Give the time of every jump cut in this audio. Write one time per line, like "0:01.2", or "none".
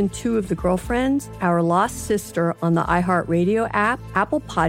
0:01.2